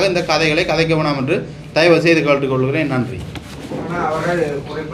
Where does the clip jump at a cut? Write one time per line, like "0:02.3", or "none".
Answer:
none